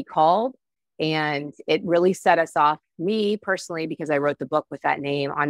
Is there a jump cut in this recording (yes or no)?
no